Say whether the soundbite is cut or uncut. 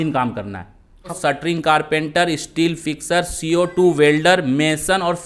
cut